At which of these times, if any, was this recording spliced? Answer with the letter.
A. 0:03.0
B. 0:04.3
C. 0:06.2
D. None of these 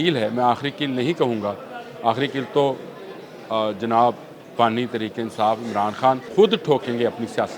C